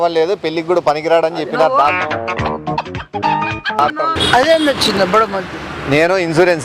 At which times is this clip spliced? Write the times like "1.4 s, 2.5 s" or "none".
2.0 s, 4.2 s